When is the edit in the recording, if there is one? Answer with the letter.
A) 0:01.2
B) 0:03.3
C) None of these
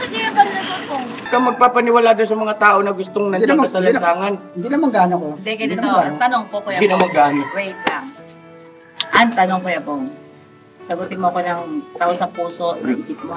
A